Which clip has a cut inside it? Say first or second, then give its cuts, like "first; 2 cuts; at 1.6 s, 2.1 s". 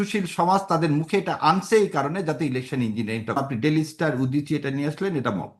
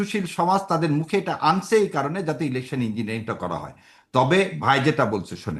first; 1 cut; at 3.4 s